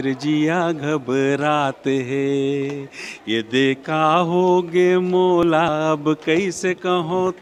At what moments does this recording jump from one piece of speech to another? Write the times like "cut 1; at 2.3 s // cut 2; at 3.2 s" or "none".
none